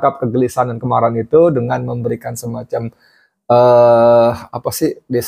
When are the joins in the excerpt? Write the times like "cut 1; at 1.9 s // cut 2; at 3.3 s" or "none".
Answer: none

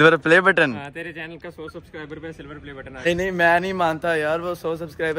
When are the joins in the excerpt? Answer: cut 1; at 3.1 s

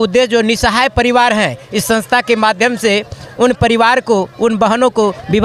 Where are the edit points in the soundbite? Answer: none

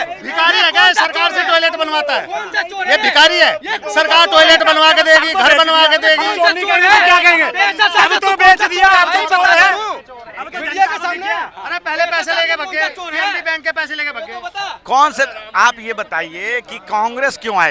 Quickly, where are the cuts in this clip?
none

